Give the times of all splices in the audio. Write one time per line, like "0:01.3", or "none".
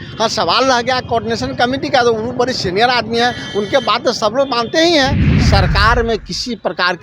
0:05.2